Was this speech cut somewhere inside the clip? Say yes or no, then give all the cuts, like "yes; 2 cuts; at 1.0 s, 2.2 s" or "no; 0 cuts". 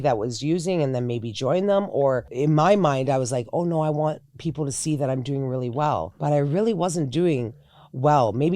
yes; 2 cuts; at 2.3 s, 6.1 s